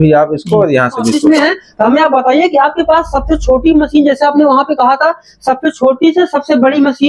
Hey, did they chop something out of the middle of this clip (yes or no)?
yes